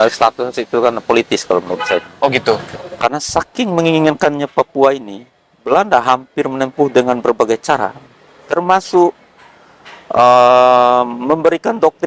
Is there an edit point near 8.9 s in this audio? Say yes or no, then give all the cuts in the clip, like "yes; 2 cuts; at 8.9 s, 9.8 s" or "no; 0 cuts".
no; 1 cut; at 2.7 s